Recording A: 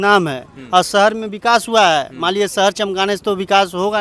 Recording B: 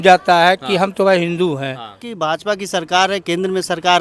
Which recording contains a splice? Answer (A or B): B